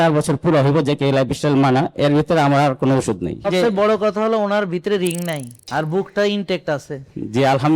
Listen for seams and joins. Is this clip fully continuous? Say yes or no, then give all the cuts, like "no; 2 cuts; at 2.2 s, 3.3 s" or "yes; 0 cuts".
no; 2 cuts; at 3.5 s, 5.5 s